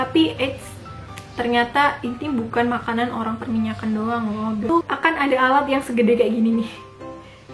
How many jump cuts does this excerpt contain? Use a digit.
1